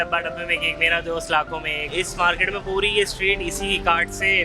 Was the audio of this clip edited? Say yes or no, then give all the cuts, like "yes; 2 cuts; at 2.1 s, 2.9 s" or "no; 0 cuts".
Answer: yes; 1 cut; at 1.9 s